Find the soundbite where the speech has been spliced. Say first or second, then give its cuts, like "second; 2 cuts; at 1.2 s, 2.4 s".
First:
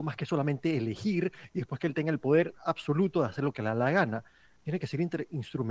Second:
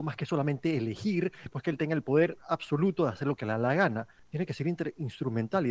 second; 2 cuts; at 1.5 s, 4.2 s